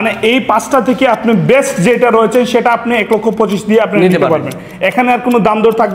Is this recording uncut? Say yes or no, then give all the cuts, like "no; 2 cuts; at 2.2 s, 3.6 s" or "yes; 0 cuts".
yes; 0 cuts